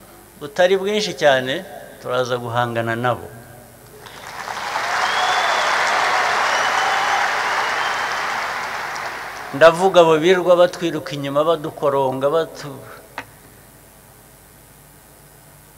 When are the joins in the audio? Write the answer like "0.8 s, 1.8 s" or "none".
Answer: none